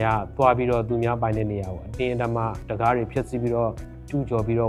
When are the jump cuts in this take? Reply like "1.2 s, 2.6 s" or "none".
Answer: none